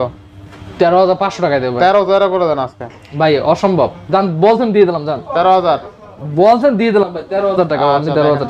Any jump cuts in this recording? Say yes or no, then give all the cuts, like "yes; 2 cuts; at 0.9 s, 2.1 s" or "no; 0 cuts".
no; 0 cuts